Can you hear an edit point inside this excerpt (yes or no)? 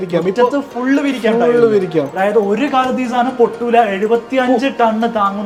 no